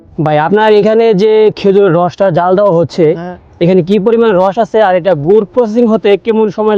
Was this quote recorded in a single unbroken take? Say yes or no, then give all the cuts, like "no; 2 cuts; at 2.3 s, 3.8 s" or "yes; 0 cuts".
yes; 0 cuts